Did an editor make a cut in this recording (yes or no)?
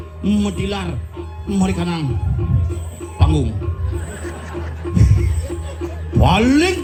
no